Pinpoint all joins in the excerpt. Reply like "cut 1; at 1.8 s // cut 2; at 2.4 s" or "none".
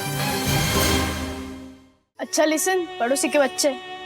cut 1; at 2.2 s